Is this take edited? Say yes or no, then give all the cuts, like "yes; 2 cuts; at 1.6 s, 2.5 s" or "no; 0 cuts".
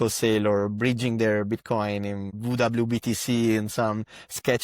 yes; 1 cut; at 2.3 s